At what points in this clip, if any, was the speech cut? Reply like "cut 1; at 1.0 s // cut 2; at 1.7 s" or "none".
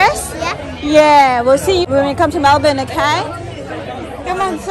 cut 1; at 1.9 s